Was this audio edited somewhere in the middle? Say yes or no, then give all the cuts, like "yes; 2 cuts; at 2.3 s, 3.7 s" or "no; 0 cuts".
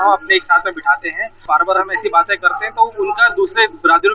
yes; 1 cut; at 1.4 s